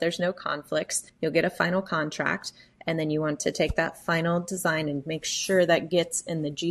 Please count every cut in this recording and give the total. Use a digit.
1